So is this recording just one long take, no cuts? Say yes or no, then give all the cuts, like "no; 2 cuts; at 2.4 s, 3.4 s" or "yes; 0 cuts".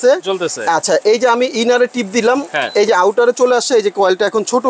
yes; 0 cuts